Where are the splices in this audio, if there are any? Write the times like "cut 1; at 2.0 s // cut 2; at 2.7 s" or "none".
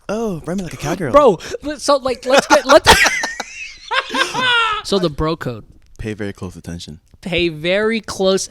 cut 1; at 4.8 s